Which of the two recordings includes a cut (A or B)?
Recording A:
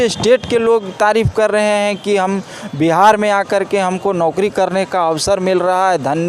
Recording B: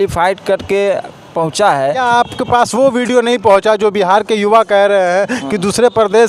B